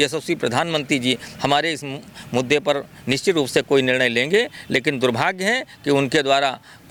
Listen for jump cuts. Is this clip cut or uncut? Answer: uncut